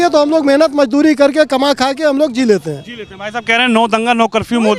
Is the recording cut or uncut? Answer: uncut